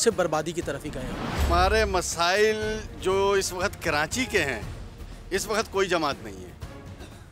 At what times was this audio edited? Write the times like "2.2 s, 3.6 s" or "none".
1.5 s